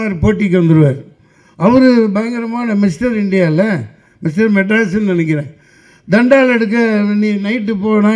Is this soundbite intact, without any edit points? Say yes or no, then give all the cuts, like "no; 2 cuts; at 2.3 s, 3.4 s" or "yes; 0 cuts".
yes; 0 cuts